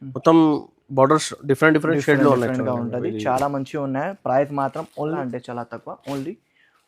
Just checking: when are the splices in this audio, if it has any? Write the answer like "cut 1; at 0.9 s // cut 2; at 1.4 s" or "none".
cut 1; at 5.2 s

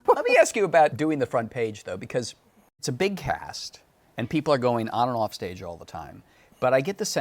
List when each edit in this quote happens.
cut 1; at 0.9 s // cut 2; at 2.8 s

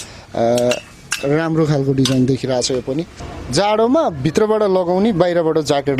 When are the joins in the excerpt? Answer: cut 1; at 3.2 s

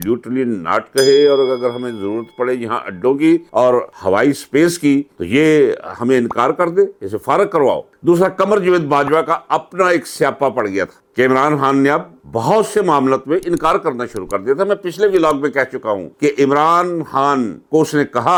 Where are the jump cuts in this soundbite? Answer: none

